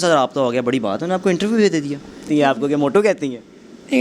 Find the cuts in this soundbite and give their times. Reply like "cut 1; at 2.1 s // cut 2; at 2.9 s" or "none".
cut 1; at 2.3 s